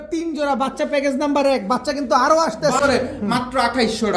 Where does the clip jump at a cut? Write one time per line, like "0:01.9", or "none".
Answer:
0:02.8